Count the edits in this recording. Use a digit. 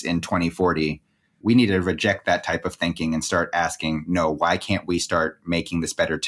1